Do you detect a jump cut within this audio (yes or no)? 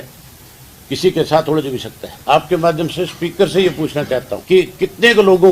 yes